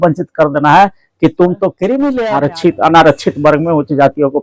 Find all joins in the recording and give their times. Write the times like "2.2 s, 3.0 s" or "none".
2.2 s